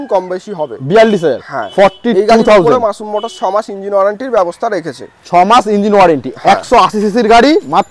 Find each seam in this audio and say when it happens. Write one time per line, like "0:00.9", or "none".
none